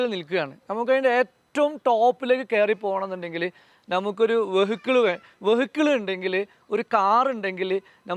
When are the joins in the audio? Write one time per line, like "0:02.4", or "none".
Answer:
none